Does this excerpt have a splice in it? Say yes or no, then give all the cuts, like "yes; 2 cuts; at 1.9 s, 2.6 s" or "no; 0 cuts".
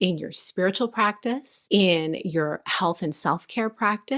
yes; 1 cut; at 1.5 s